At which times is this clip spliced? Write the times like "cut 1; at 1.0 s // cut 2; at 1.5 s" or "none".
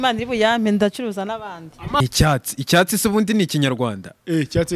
cut 1; at 2.0 s